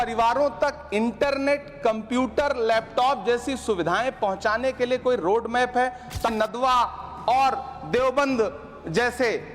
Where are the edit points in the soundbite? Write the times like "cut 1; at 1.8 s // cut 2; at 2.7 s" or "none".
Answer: cut 1; at 6.3 s